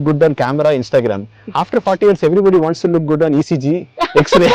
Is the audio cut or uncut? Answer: uncut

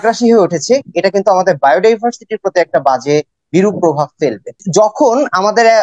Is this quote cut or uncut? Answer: cut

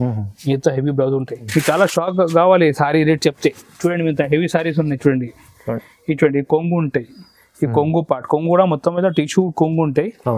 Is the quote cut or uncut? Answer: cut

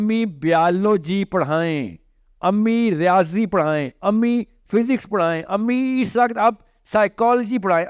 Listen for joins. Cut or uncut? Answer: uncut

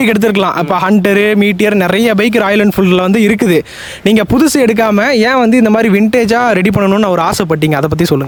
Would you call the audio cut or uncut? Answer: uncut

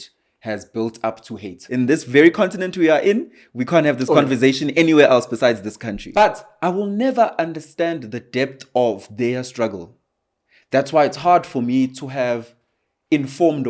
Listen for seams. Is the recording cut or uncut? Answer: cut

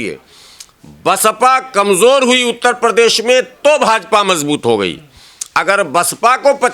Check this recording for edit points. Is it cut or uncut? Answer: uncut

